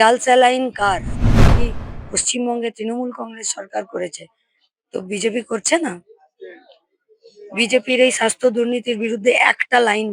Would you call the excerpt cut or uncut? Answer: cut